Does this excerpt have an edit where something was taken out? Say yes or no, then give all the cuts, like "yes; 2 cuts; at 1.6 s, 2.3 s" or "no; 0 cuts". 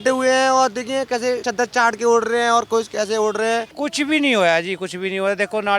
yes; 2 cuts; at 1.5 s, 3.7 s